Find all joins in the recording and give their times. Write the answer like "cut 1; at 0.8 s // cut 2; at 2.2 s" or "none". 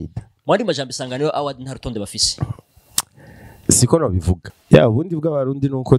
cut 1; at 4.4 s